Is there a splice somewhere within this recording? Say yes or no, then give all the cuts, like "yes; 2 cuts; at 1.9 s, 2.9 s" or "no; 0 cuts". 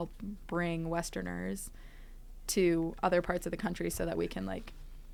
no; 0 cuts